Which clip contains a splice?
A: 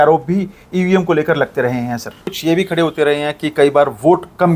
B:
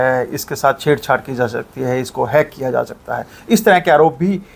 A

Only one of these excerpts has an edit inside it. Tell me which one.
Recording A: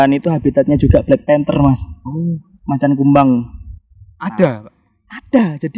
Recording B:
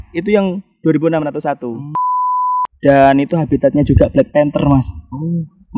B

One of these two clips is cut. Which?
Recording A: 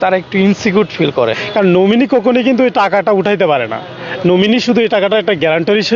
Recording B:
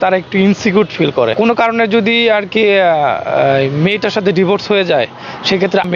A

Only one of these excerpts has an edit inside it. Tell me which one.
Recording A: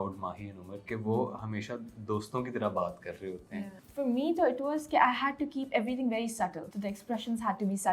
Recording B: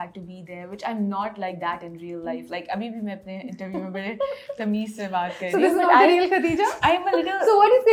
A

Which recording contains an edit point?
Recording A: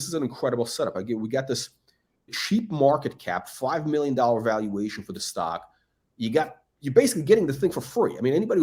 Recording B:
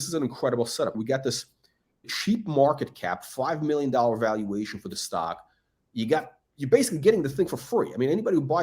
B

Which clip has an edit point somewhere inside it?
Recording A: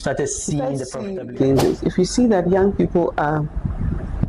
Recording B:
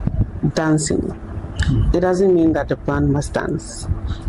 A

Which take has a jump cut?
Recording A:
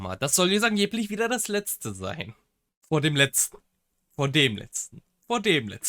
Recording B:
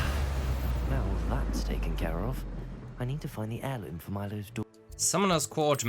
B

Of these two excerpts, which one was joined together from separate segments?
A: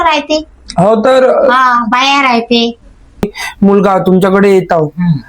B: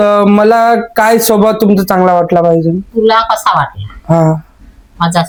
A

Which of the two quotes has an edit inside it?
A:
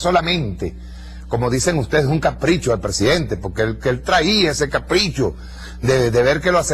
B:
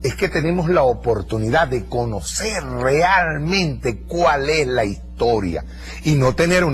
A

